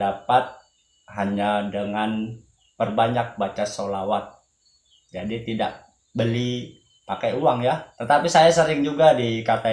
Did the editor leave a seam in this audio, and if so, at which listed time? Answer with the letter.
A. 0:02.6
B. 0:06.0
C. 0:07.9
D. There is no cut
C